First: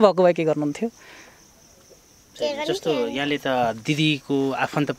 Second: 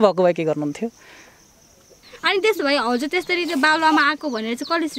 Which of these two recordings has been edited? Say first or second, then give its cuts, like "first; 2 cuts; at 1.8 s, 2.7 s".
second; 1 cut; at 2.0 s